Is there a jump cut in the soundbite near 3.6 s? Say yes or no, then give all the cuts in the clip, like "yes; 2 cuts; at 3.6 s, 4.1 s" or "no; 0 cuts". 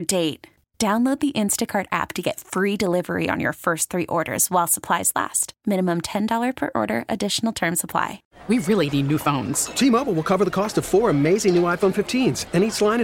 no; 1 cut; at 8.3 s